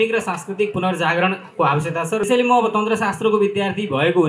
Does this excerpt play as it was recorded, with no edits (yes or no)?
no